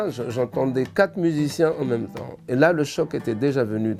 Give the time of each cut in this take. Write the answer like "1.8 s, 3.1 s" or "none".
none